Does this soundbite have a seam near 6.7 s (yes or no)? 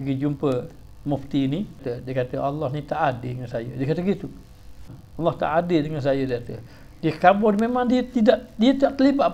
no